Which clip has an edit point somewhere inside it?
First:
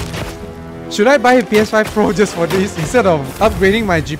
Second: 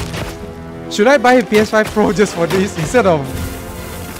first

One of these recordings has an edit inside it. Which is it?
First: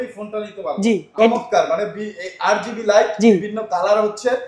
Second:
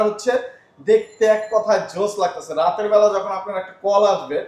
first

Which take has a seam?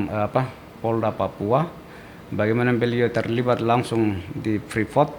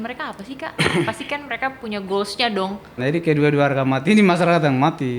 second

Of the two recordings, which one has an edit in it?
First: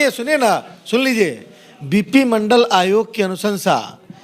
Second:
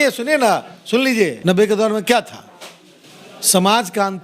second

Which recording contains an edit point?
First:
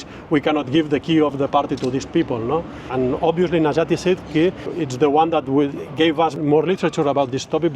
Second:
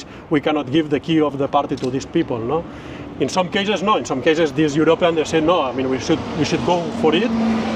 first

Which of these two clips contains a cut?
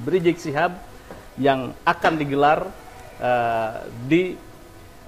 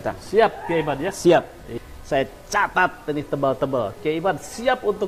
second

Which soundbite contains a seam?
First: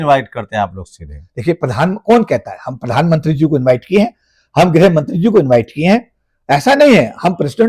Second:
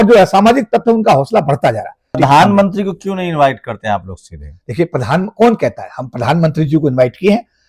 second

